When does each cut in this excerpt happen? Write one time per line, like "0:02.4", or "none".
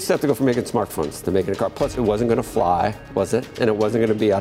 0:01.9